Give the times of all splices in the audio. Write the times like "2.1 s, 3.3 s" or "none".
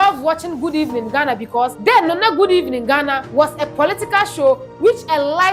1.8 s, 3.2 s

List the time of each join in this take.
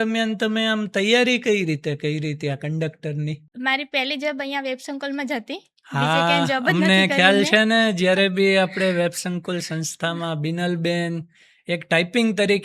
3.4 s

